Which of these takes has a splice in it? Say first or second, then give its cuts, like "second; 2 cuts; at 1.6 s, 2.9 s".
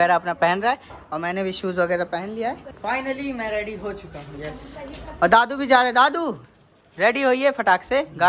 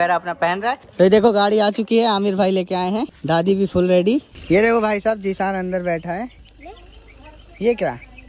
second; 3 cuts; at 0.8 s, 3.1 s, 4.3 s